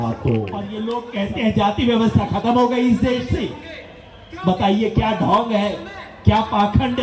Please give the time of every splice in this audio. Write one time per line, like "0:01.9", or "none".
0:00.9